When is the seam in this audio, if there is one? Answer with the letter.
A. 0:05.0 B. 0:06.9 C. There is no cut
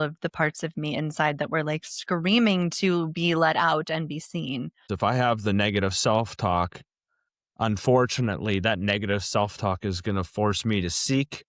A